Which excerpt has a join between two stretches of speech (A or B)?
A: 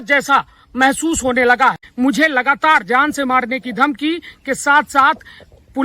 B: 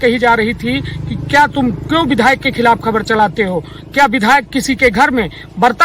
A